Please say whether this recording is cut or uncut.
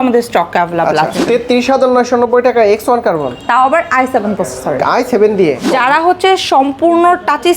cut